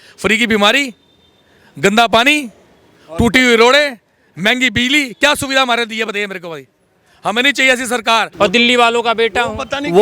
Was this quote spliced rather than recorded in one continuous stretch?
yes; 1 cut; at 8.3 s

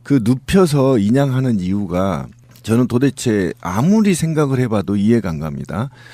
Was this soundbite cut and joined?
yes; 1 cut; at 1.8 s

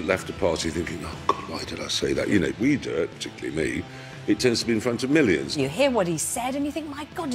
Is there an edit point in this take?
yes; 2 cuts; at 2.3 s, 5.6 s

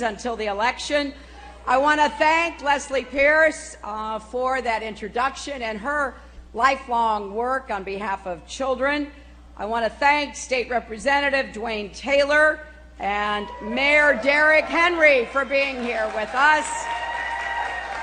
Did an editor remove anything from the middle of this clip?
yes; 1 cut; at 8.8 s

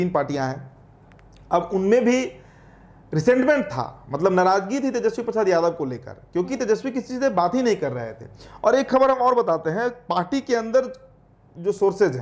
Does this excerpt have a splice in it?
no; 0 cuts

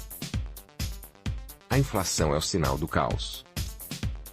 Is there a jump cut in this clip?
yes; 2 cuts; at 1.5 s, 3.3 s

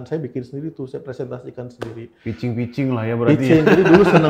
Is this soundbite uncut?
yes; 0 cuts

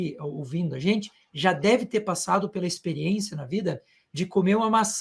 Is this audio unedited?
yes; 0 cuts

